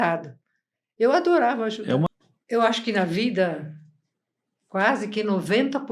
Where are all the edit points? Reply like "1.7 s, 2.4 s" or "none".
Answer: 2.1 s